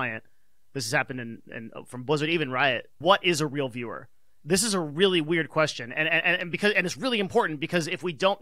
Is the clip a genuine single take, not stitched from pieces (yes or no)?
no